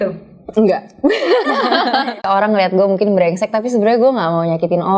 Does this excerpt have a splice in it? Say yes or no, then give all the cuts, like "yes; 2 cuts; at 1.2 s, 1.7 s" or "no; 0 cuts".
yes; 1 cut; at 2.3 s